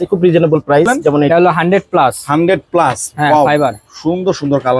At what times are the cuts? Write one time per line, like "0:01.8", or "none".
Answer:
0:01.3